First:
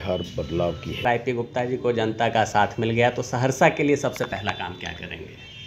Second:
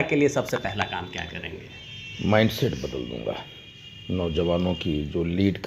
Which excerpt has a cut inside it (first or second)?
first